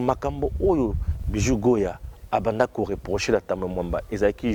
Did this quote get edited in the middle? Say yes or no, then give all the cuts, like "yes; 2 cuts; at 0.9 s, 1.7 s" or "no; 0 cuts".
no; 0 cuts